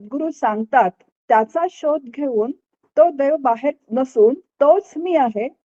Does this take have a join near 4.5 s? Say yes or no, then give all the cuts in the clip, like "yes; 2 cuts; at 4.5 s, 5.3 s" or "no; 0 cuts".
yes; 3 cuts; at 1.2 s, 3.8 s, 4.5 s